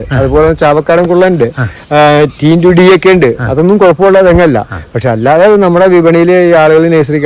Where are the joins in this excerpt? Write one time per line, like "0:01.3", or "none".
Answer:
none